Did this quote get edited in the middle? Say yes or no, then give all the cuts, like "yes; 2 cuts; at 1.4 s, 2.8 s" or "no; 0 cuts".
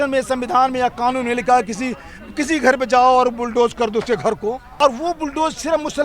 yes; 1 cut; at 4.7 s